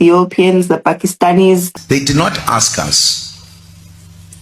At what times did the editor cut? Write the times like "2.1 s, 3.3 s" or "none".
1.7 s